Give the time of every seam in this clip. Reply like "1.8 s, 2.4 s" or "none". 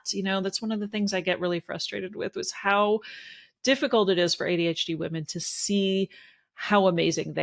none